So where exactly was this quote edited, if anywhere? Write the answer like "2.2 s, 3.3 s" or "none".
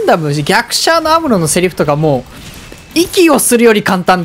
none